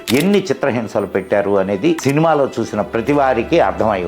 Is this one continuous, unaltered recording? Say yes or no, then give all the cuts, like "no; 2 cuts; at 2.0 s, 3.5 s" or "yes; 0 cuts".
no; 1 cut; at 2.0 s